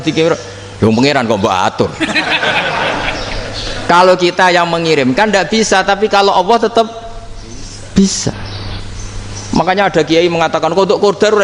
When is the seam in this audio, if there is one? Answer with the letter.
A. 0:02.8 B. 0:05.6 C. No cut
C